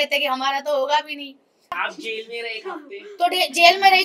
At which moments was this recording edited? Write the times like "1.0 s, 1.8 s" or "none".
1.7 s